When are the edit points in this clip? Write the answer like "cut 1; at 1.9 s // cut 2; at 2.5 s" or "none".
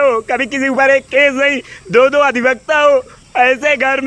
none